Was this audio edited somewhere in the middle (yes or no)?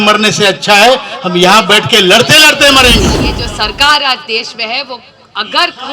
yes